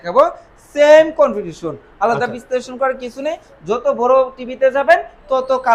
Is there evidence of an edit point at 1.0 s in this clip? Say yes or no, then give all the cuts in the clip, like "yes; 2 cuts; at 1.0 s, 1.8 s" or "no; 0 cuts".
no; 0 cuts